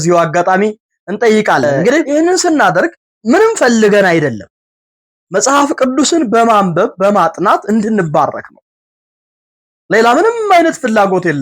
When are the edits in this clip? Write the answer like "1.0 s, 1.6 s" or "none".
2.1 s, 3.1 s